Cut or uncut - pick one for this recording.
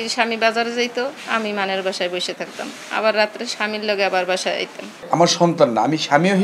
cut